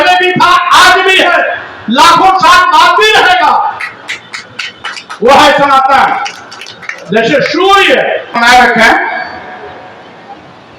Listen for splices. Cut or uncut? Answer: cut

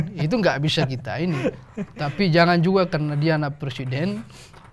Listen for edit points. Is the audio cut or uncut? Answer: uncut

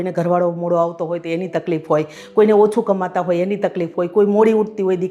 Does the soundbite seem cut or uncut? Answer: uncut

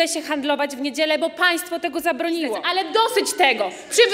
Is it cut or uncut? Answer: cut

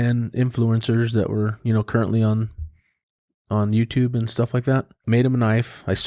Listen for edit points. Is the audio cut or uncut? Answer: cut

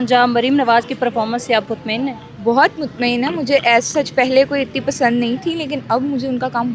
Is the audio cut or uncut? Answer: uncut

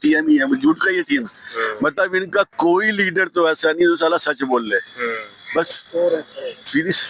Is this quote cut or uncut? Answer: uncut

